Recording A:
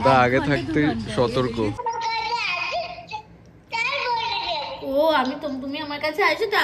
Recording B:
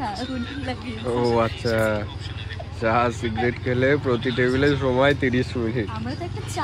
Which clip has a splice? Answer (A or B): A